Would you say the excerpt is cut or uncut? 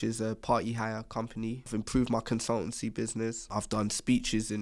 cut